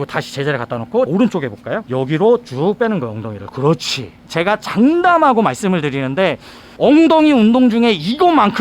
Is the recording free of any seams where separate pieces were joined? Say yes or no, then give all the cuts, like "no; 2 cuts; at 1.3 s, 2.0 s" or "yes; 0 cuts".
no; 1 cut; at 4.3 s